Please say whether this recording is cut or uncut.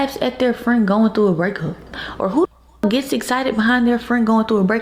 uncut